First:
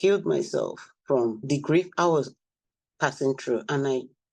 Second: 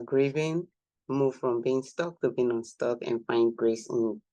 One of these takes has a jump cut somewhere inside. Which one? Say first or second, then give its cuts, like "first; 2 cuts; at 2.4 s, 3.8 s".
first; 1 cut; at 1.4 s